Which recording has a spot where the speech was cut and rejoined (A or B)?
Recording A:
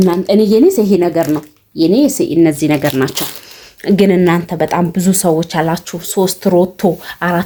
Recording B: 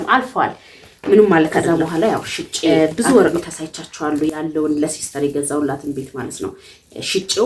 B